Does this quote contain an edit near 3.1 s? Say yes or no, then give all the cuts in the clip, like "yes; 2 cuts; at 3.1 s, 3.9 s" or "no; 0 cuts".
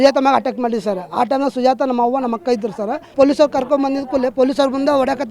yes; 1 cut; at 3.1 s